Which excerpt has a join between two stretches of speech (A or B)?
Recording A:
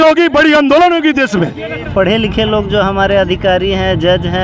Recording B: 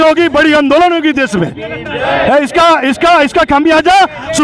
A